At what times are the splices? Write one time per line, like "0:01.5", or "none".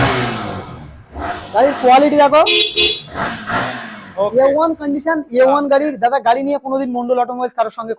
none